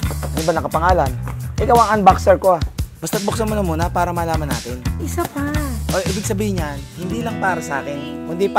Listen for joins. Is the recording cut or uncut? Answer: cut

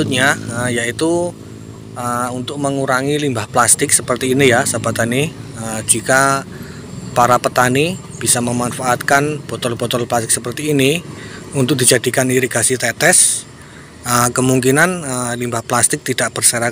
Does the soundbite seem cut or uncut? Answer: uncut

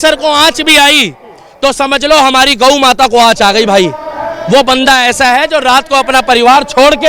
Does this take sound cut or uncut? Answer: uncut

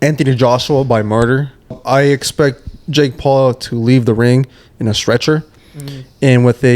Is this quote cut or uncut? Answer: cut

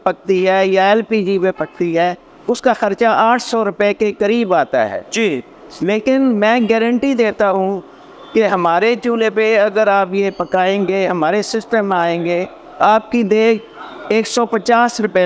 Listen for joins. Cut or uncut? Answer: uncut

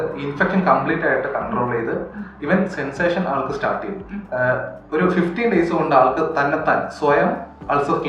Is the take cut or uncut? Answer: cut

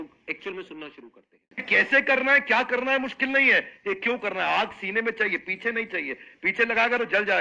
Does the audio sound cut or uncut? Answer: cut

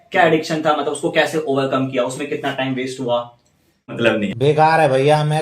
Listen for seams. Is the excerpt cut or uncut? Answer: cut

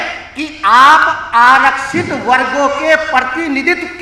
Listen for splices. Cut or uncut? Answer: uncut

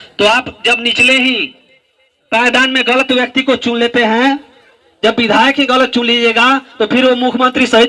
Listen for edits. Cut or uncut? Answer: uncut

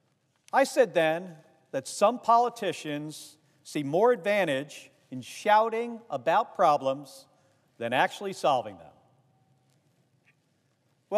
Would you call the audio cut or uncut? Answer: cut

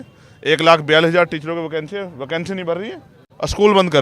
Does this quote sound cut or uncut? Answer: uncut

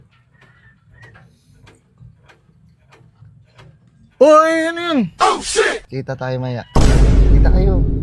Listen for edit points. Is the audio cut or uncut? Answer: uncut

